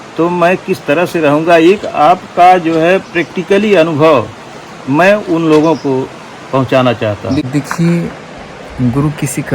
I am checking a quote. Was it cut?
yes; 1 cut; at 7.5 s

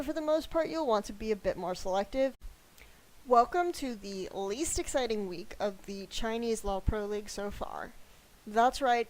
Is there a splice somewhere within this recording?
no; 0 cuts

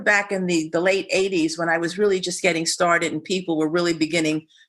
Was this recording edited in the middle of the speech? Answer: no; 0 cuts

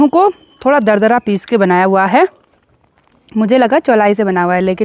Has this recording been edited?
no; 0 cuts

